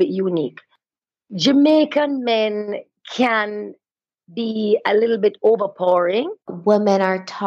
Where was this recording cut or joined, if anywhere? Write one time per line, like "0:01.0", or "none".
0:06.5